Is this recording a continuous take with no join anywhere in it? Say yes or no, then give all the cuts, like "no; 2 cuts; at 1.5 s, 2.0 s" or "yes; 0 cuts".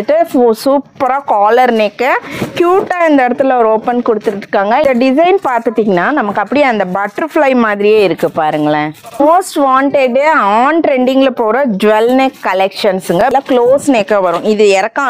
no; 3 cuts; at 4.8 s, 9.2 s, 13.2 s